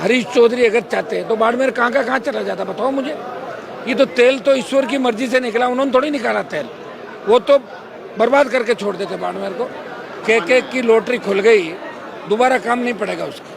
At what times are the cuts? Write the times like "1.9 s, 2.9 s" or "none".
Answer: 10.2 s

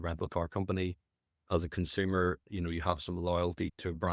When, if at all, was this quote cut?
none

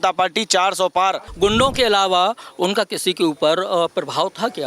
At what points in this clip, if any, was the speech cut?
1.3 s

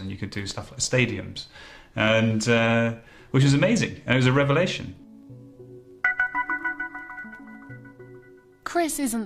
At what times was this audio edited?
3.7 s

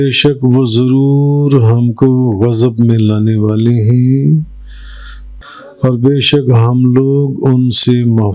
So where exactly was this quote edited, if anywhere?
5.2 s

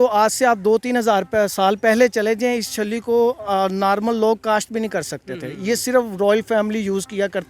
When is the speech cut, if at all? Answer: none

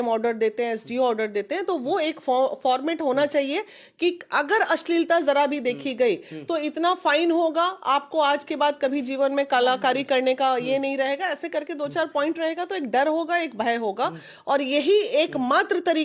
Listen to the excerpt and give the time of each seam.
none

